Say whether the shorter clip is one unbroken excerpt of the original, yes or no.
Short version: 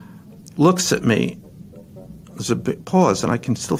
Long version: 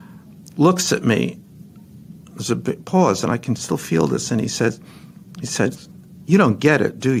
yes